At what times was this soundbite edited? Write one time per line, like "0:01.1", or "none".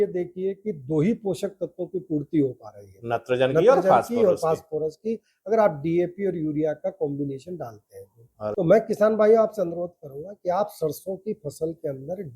0:08.5